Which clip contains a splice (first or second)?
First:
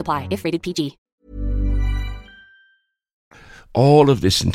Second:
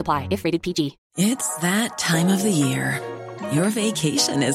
second